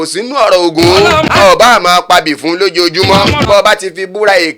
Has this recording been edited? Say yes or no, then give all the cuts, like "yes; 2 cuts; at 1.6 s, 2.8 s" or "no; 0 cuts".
yes; 2 cuts; at 1.3 s, 3.5 s